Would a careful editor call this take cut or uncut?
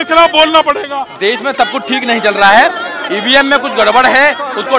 cut